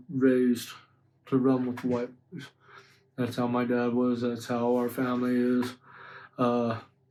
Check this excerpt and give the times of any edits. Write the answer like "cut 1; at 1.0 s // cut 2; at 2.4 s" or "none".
none